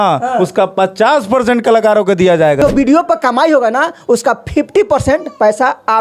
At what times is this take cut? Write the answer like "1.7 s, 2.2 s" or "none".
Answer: 2.6 s